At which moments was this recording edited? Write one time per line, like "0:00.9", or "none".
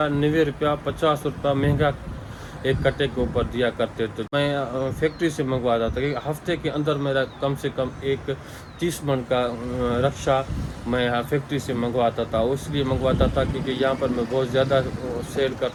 none